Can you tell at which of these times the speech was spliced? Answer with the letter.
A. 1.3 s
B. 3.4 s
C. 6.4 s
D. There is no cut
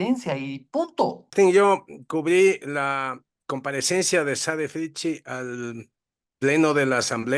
A